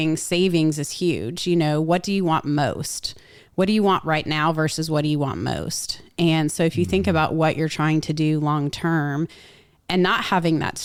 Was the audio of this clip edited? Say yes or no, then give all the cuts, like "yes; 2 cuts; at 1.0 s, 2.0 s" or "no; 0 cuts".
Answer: no; 0 cuts